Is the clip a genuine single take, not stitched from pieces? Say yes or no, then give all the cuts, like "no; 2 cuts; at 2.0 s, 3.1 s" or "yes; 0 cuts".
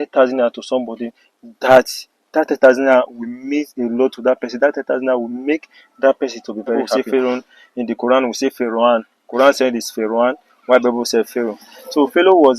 no; 1 cut; at 6.9 s